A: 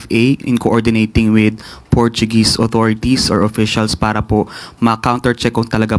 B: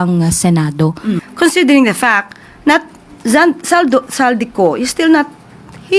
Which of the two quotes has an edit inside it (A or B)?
B